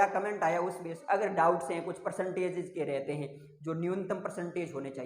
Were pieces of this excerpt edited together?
yes; 1 cut; at 0.9 s

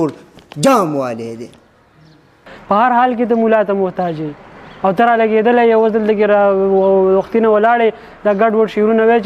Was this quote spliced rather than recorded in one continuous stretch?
yes; 1 cut; at 2.5 s

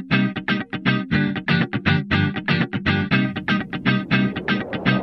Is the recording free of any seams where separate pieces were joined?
yes; 0 cuts

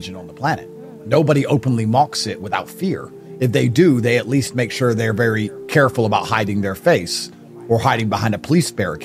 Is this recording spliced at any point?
no; 0 cuts

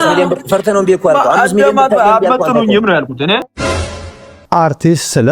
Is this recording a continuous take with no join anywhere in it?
no; 1 cut; at 4.0 s

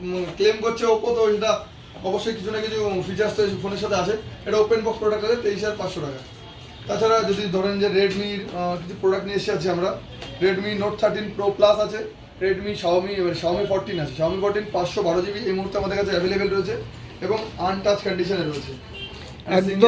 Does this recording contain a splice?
no; 0 cuts

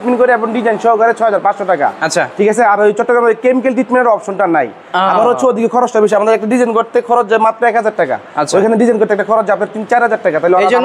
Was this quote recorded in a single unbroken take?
yes; 0 cuts

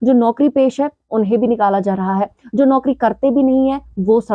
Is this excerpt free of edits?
yes; 0 cuts

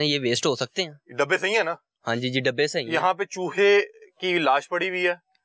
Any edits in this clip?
no; 0 cuts

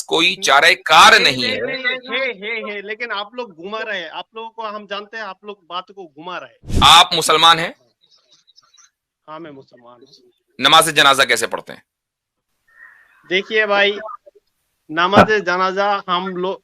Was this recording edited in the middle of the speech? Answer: yes; 1 cut; at 6.6 s

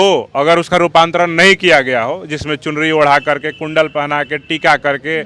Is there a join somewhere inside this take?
no; 0 cuts

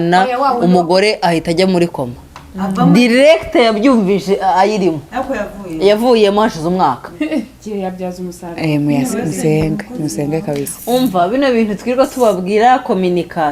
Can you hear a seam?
yes; 1 cut; at 7.1 s

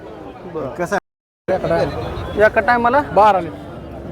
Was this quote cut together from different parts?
yes; 1 cut; at 1.0 s

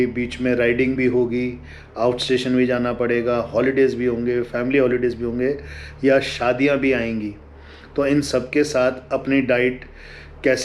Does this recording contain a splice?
no; 0 cuts

